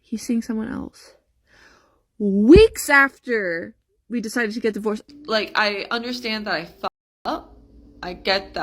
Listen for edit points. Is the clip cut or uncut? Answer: cut